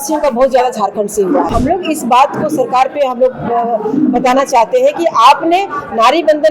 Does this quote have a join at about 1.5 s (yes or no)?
yes